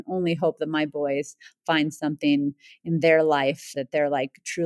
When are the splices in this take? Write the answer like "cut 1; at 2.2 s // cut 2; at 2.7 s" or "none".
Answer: cut 1; at 3.8 s

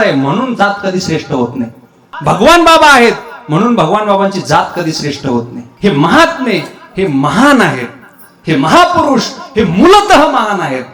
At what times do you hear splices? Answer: cut 1; at 2.1 s // cut 2; at 5.6 s

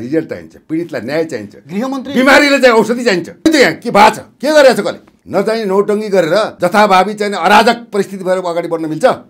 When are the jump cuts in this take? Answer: none

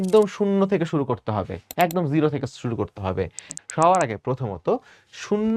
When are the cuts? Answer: cut 1; at 3.5 s

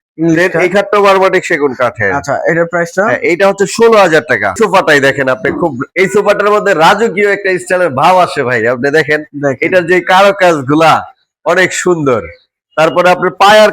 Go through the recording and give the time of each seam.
cut 1; at 4.6 s

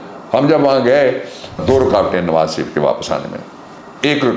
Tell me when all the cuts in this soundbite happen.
cut 1; at 1.6 s

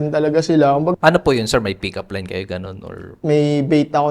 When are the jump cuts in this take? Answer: cut 1; at 0.9 s // cut 2; at 3.1 s

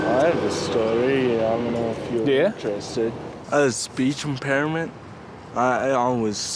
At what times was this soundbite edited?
cut 1; at 3.3 s

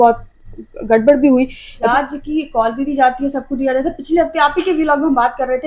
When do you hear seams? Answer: cut 1; at 1.8 s

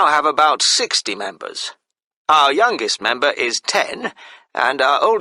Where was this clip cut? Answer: none

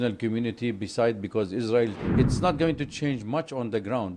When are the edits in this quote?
cut 1; at 2.0 s

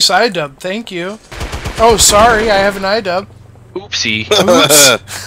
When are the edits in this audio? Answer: cut 1; at 1.3 s

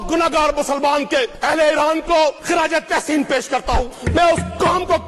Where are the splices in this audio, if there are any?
cut 1; at 1.3 s // cut 2; at 2.4 s // cut 3; at 4.0 s

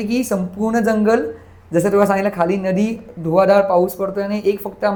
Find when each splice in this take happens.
none

